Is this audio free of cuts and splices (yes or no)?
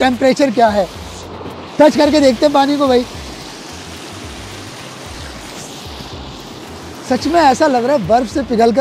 no